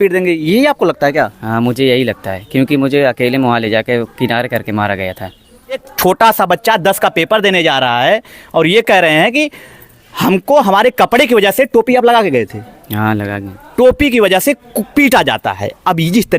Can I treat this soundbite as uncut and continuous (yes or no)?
no